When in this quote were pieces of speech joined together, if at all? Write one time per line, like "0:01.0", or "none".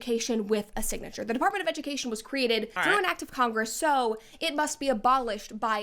0:02.7
0:04.1